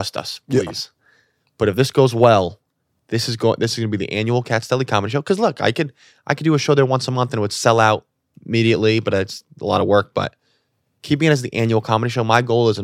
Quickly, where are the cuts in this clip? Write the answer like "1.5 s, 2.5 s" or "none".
none